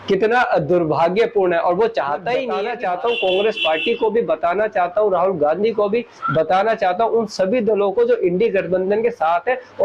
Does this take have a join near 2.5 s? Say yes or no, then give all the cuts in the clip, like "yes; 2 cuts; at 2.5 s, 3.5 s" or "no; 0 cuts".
yes; 1 cut; at 2.5 s